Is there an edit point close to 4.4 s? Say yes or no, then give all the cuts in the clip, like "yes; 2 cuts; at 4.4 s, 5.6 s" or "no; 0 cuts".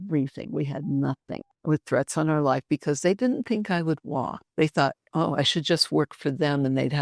yes; 2 cuts; at 1.5 s, 4.4 s